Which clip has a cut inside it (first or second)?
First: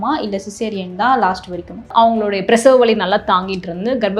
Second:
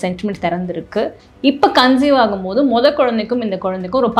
first